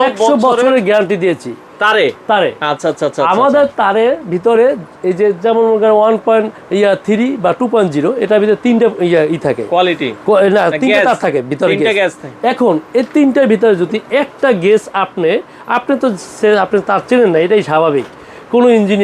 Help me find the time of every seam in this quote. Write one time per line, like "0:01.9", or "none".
none